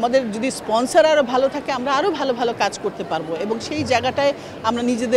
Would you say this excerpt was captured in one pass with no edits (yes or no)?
yes